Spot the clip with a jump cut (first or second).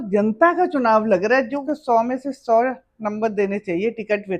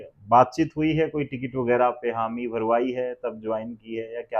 first